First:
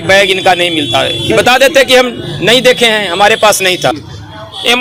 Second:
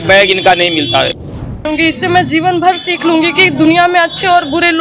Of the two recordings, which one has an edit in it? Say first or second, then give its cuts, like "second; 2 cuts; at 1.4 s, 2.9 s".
second; 1 cut; at 1.3 s